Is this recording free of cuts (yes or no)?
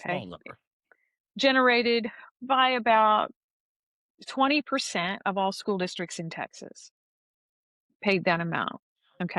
yes